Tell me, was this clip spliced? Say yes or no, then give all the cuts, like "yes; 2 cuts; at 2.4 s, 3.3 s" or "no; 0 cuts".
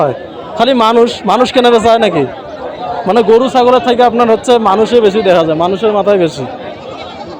no; 0 cuts